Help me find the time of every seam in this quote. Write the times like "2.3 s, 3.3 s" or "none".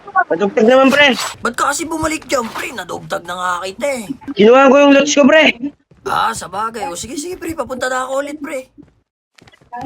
1.4 s, 4.2 s